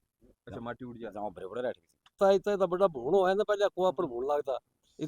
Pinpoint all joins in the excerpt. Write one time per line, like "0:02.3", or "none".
0:02.1

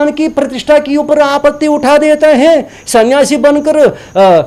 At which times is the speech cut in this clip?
none

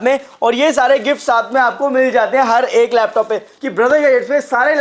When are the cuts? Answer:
0:03.5

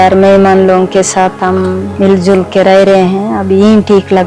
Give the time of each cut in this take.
0:01.9

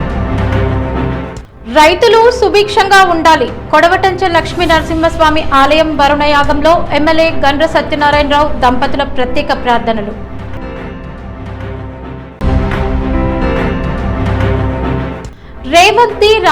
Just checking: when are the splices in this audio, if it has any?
none

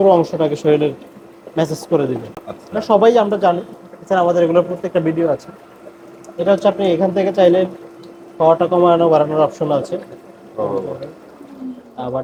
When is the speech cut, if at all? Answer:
none

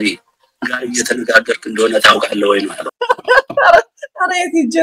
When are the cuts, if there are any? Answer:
none

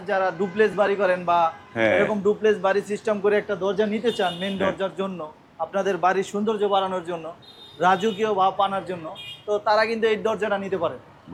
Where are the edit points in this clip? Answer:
none

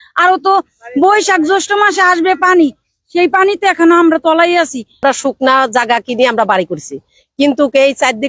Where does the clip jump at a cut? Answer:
0:05.0

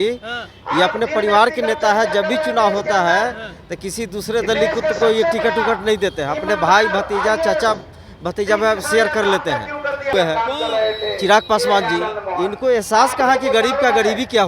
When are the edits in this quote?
0:10.1

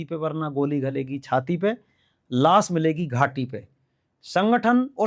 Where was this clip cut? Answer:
none

